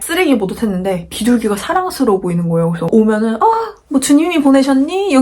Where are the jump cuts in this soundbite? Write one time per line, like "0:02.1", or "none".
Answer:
0:02.9